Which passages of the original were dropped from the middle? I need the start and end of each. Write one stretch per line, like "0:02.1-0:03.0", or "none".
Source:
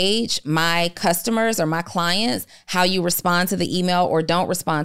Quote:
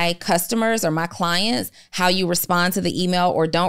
none